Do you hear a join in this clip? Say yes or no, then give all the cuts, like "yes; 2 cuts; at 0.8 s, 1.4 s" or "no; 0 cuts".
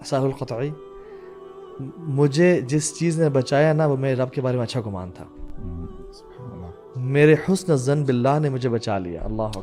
no; 0 cuts